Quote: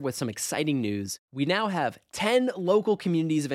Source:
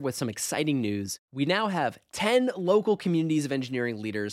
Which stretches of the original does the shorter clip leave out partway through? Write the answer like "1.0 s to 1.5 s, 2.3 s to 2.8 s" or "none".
none

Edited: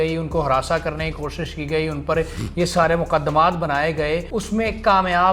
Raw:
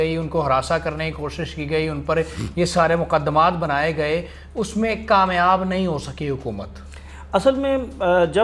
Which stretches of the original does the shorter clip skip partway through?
4.3 s to 4.6 s

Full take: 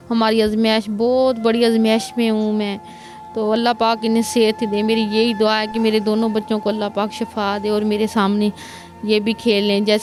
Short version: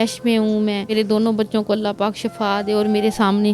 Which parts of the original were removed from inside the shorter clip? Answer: 2.8 s to 5.9 s

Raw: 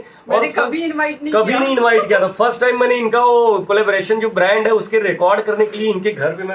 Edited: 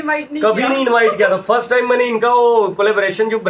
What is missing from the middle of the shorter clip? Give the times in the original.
none

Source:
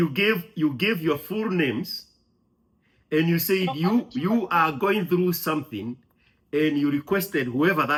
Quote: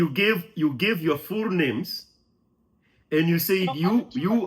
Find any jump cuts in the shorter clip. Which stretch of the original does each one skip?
none

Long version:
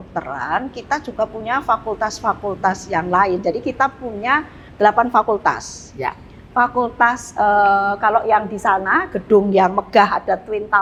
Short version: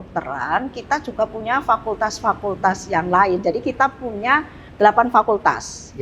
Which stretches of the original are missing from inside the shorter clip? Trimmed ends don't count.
none

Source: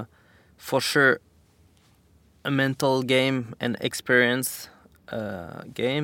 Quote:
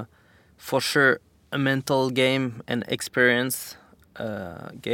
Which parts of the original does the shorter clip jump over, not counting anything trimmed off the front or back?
1.4 s to 2.3 s

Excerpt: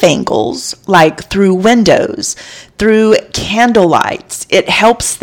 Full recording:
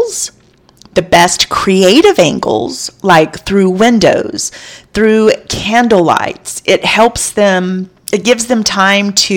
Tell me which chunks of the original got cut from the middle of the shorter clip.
none

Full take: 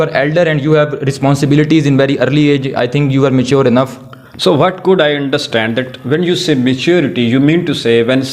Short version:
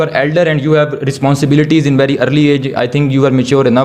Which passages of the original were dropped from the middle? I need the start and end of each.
none

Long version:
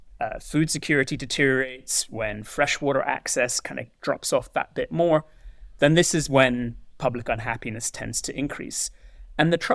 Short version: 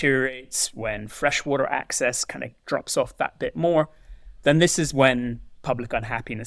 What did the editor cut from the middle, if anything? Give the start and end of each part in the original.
none

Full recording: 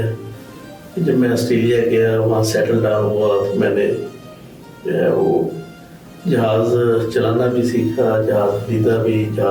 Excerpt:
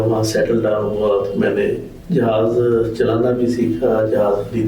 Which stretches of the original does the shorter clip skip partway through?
4.1 s to 6.1 s

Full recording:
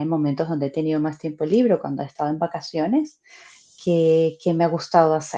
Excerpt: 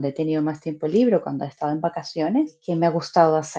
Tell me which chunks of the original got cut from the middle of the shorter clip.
3.2 s to 4.4 s

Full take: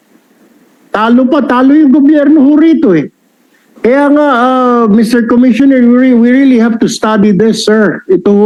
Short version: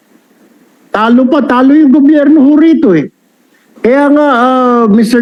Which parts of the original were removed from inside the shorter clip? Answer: none

